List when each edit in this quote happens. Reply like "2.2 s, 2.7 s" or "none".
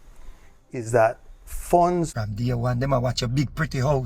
2.1 s